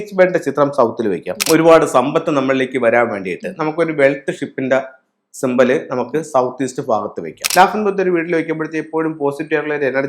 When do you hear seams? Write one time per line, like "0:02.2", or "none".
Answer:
0:01.4
0:07.3